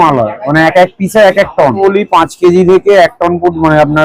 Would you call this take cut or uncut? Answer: cut